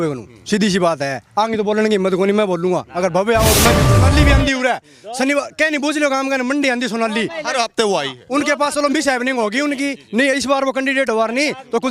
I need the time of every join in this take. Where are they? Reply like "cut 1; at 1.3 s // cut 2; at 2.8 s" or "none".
cut 1; at 3.9 s